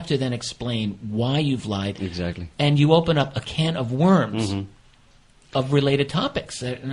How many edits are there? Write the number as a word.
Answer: zero